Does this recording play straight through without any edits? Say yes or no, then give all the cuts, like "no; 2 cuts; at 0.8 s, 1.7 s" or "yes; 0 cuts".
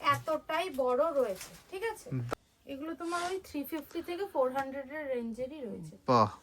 no; 1 cut; at 2.2 s